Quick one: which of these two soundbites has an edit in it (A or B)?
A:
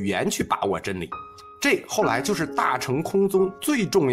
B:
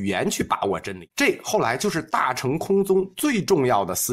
B